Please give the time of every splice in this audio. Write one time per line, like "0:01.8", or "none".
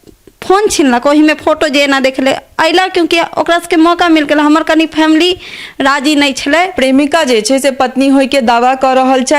0:06.7